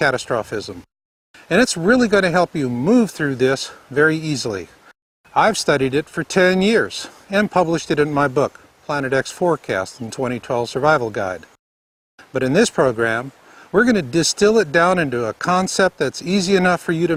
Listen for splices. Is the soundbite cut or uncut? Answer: uncut